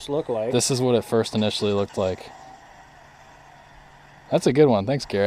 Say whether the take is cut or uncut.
cut